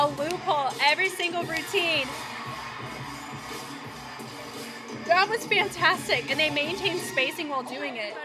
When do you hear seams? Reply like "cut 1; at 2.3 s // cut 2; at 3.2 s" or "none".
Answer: none